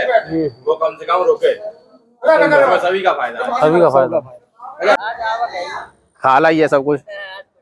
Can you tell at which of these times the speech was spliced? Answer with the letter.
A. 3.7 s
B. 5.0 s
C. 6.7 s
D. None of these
B